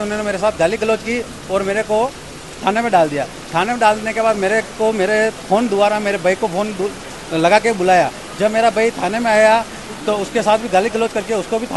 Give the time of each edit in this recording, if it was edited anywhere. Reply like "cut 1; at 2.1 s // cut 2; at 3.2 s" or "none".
none